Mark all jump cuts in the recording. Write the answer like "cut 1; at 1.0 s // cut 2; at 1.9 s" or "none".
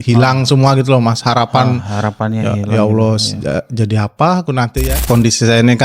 cut 1; at 4.9 s